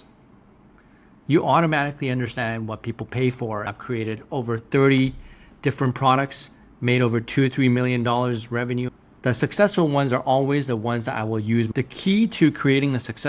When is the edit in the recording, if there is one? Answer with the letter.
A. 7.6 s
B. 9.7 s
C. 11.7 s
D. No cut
C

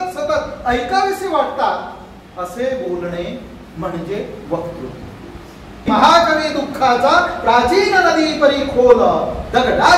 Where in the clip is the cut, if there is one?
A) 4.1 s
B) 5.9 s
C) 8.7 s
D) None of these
B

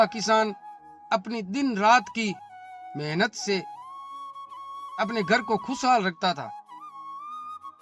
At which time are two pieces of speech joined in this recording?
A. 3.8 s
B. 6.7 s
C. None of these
B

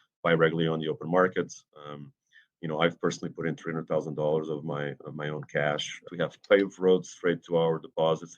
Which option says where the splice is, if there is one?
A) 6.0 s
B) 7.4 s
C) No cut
A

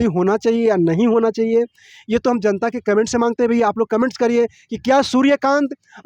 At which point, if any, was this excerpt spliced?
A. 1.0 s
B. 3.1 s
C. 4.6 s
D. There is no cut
D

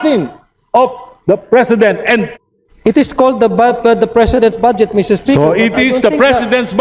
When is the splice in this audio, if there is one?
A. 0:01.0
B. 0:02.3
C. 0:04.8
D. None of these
B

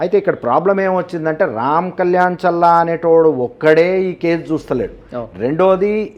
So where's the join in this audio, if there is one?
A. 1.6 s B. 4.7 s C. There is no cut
C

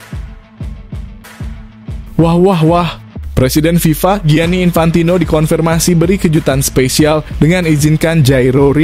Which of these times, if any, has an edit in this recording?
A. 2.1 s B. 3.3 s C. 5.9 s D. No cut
A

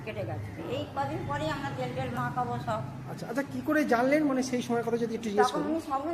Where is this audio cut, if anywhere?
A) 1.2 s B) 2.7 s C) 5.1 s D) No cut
D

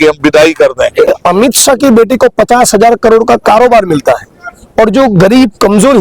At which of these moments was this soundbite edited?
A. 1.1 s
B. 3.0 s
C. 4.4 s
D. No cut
A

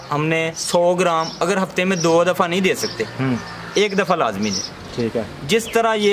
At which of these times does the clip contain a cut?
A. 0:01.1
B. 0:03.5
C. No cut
C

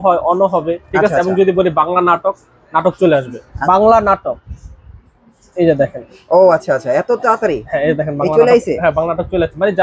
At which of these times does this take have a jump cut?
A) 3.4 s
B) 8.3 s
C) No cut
A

